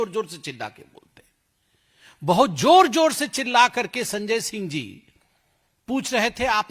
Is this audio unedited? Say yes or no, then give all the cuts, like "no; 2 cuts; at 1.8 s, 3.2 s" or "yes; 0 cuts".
yes; 0 cuts